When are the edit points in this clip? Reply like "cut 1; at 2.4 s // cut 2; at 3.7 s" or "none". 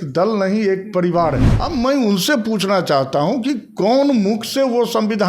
cut 1; at 1.5 s